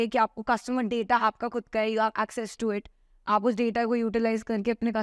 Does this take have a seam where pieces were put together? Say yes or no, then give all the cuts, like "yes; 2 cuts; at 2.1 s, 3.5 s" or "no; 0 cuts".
no; 0 cuts